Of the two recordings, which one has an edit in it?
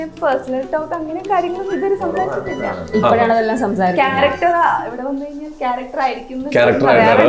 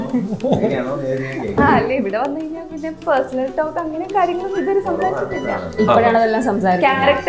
second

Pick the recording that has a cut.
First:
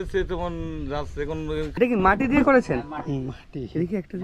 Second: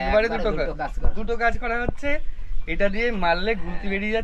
first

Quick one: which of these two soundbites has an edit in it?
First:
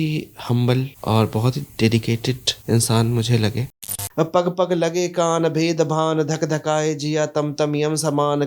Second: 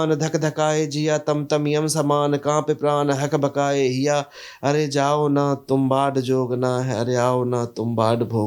first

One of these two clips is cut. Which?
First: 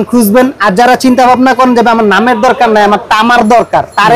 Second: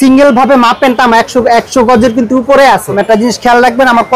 second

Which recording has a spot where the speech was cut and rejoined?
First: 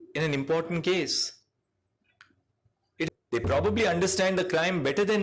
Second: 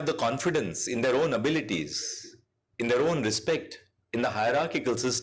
first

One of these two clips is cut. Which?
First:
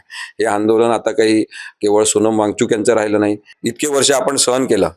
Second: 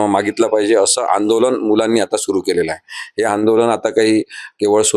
first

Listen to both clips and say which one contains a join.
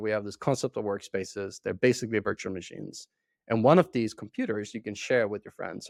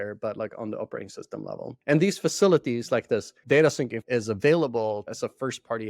second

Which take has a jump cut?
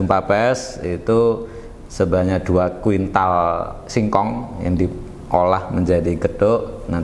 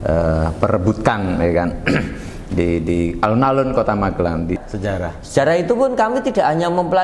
second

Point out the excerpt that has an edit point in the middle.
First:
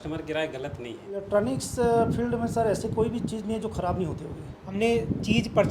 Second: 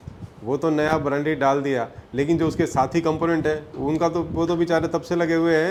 first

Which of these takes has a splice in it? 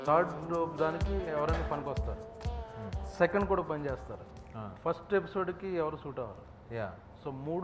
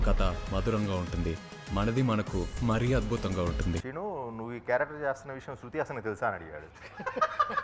second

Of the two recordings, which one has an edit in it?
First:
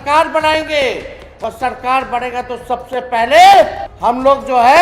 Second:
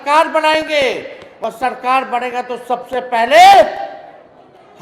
first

